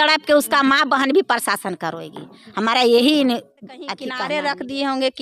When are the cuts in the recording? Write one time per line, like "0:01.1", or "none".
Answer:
0:04.1

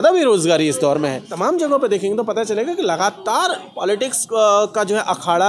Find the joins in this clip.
0:01.3
0:04.2

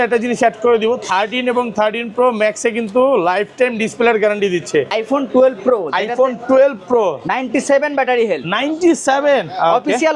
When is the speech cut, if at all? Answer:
0:04.9

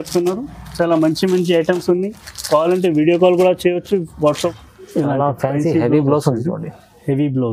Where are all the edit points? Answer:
0:04.5

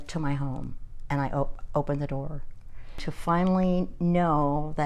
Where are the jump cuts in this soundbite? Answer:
0:03.1

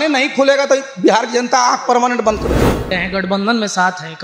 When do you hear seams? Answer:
0:02.9

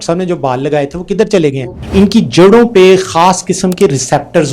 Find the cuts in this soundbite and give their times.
0:01.7

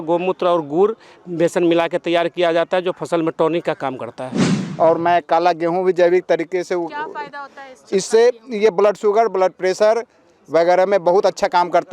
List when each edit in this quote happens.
0:04.6

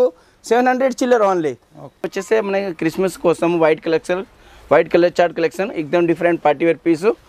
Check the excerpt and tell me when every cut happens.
0:02.1

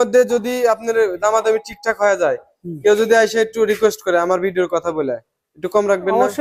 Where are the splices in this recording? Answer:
none

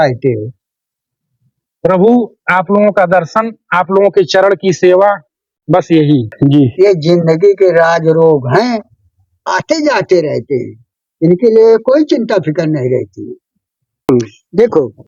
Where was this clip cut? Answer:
0:06.3
0:14.1

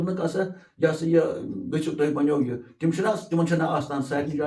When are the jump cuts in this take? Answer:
none

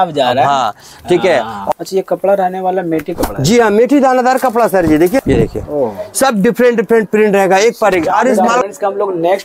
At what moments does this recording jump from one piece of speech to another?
0:01.7
0:05.2
0:08.6

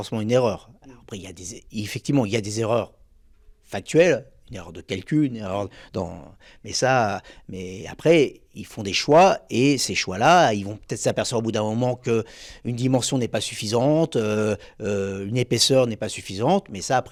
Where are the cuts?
none

